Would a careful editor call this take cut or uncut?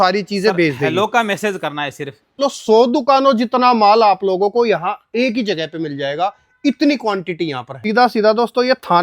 cut